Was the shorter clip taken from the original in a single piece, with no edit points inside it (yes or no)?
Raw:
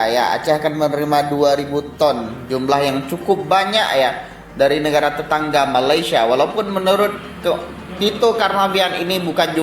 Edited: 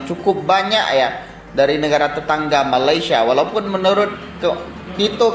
yes